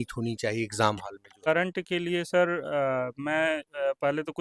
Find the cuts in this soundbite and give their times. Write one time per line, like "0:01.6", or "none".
0:01.5